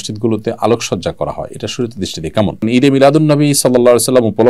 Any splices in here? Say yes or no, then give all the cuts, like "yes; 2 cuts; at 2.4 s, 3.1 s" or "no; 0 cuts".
yes; 1 cut; at 2.6 s